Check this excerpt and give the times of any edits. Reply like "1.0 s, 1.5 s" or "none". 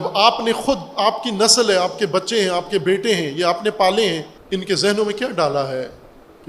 4.3 s